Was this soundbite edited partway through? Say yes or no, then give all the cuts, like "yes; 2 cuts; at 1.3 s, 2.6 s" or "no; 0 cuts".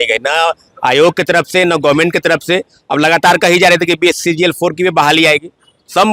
no; 0 cuts